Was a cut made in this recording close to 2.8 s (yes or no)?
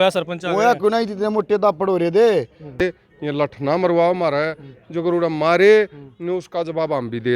yes